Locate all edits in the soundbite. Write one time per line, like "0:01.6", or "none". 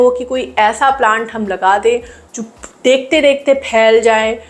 none